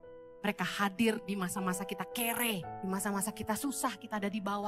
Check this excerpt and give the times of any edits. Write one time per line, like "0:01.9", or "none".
0:02.7